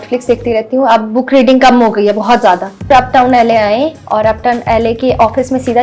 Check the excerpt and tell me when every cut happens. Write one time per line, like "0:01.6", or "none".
0:02.9